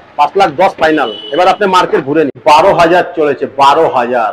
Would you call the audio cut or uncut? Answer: cut